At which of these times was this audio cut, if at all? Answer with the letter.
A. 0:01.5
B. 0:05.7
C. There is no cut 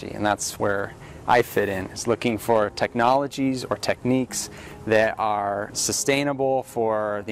B